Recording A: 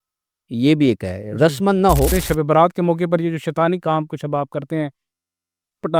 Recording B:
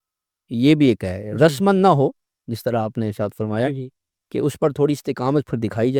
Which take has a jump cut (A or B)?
A